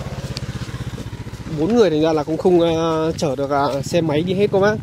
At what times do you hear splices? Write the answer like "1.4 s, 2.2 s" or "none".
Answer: none